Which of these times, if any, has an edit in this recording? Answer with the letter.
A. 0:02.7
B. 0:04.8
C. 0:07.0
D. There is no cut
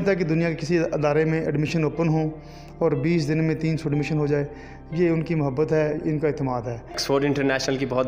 C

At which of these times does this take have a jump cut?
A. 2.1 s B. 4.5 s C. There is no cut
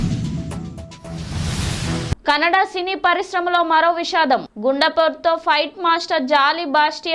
A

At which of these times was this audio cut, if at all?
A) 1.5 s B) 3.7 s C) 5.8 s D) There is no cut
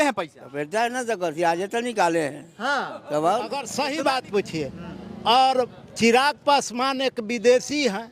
B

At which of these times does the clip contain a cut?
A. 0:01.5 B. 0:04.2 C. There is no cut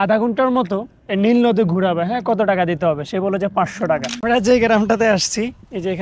B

